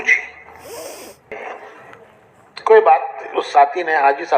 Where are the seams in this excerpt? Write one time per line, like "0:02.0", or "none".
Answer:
0:01.3